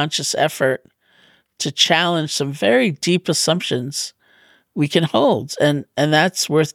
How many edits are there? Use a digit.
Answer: 0